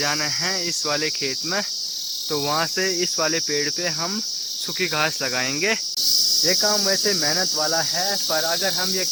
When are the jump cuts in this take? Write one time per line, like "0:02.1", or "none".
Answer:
none